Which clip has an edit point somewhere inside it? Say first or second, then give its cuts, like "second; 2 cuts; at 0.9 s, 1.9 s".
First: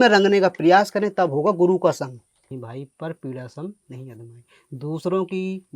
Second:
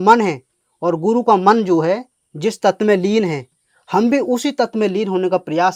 first; 1 cut; at 2.5 s